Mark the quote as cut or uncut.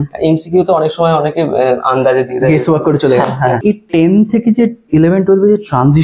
cut